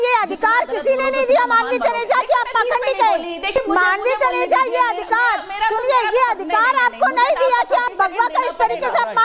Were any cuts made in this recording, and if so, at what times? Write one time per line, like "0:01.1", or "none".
none